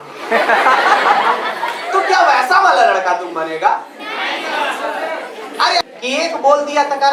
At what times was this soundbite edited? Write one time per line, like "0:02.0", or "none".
0:05.8